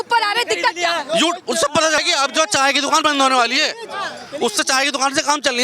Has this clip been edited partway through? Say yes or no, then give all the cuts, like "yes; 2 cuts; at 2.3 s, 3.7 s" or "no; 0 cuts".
yes; 1 cut; at 2.0 s